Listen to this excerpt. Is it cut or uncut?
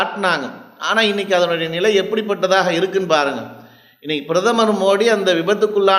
uncut